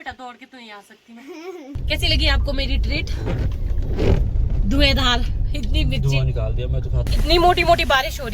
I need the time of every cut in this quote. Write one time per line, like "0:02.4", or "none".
0:01.8
0:07.0